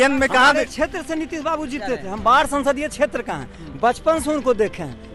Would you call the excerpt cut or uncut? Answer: uncut